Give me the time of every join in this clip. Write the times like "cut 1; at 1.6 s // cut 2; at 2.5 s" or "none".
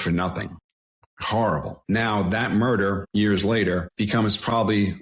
cut 1; at 0.9 s // cut 2; at 1.7 s // cut 3; at 3.0 s // cut 4; at 3.9 s